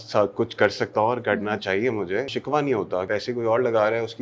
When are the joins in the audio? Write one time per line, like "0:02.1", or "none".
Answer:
0:02.3
0:03.1